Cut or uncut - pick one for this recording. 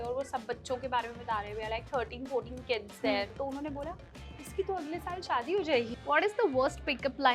cut